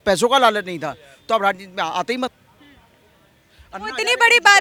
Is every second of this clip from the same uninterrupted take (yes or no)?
yes